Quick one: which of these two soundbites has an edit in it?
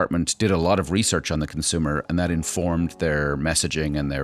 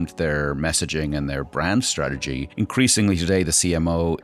second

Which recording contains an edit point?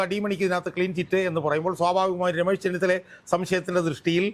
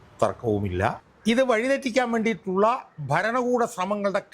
second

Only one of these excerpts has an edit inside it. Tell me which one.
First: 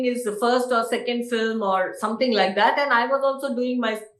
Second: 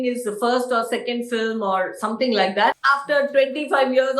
second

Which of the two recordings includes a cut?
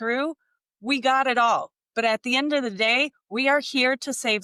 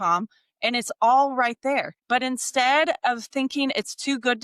second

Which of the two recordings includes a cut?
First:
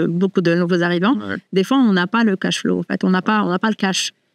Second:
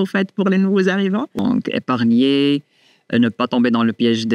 second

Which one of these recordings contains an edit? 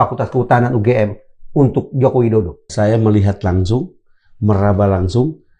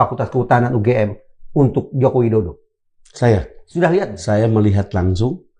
first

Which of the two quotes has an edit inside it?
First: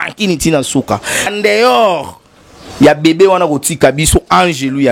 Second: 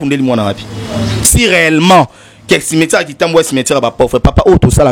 first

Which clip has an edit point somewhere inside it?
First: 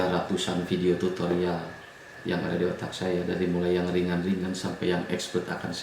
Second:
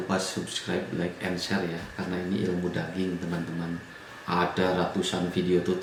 first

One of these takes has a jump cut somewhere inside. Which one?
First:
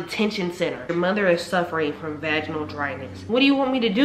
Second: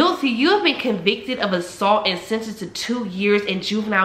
first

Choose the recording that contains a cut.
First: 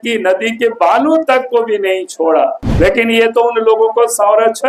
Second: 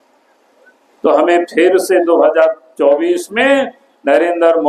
first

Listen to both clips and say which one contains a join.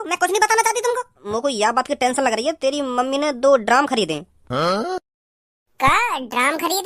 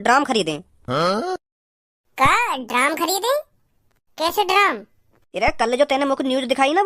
first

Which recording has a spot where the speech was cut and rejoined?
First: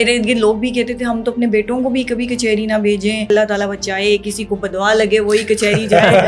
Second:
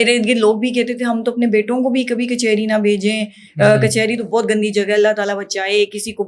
first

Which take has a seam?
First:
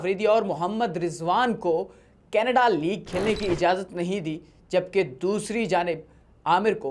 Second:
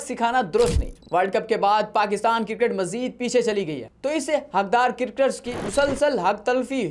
second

